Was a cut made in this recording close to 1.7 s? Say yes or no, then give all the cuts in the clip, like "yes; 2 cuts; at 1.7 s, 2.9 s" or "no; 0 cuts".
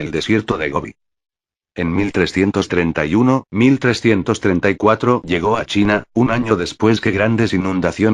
no; 0 cuts